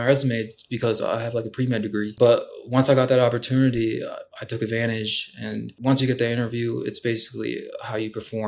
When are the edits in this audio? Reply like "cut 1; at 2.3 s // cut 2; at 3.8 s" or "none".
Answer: cut 1; at 2.1 s // cut 2; at 5.7 s